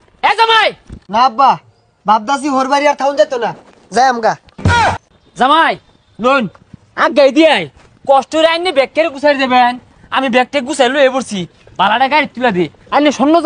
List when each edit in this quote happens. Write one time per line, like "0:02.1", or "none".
none

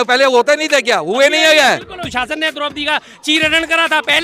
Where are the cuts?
0:02.1

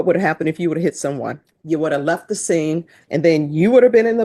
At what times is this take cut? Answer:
0:01.5
0:03.0

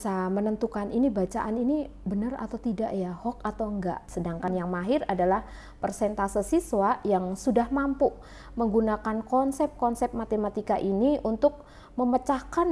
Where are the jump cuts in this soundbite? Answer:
0:04.1

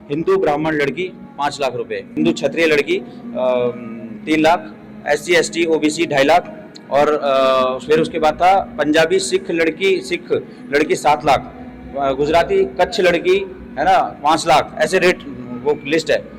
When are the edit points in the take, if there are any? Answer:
0:02.0

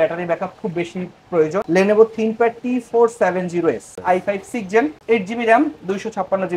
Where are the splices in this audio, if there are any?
0:01.7
0:04.0

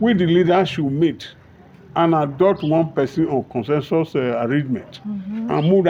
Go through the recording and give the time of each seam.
none

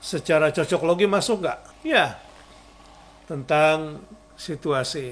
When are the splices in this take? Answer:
0:01.7

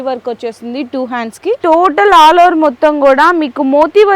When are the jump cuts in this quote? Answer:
0:01.6

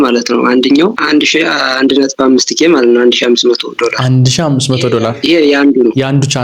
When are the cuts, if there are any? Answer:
0:01.0

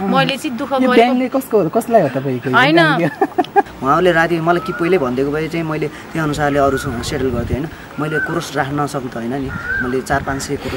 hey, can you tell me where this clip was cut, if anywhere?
0:03.7

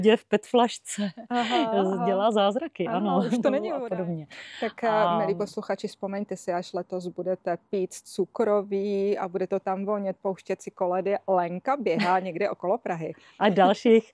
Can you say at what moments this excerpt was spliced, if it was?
0:03.7

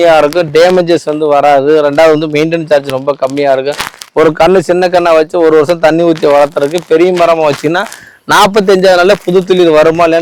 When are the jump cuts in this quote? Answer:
none

